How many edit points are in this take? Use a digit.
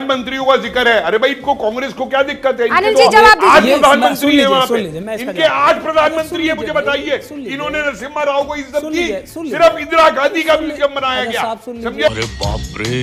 1